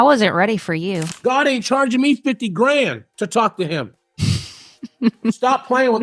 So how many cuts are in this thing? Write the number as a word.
one